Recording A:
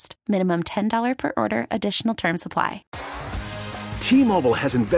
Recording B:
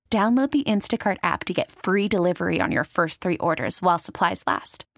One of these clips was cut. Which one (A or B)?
A